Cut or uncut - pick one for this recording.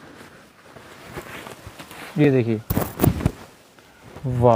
uncut